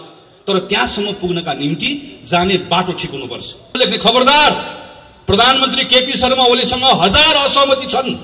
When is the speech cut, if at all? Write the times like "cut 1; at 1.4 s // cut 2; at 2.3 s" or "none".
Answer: cut 1; at 3.7 s